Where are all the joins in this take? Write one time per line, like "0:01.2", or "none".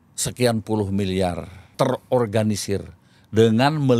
0:01.7